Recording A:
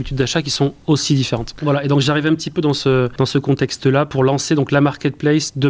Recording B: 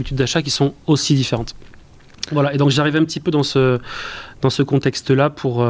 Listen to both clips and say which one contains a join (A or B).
A